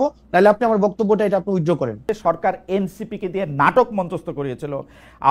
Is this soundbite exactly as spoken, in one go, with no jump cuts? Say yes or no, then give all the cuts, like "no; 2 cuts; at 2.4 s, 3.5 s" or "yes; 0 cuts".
no; 1 cut; at 2.1 s